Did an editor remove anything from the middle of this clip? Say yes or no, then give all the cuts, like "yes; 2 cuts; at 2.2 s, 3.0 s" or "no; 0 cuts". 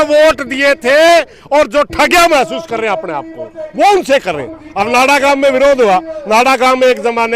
no; 0 cuts